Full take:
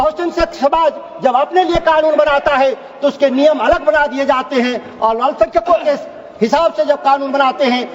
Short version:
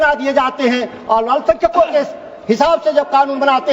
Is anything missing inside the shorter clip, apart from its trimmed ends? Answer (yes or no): no